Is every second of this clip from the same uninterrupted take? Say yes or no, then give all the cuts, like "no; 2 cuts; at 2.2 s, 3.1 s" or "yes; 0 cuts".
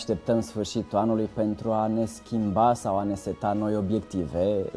yes; 0 cuts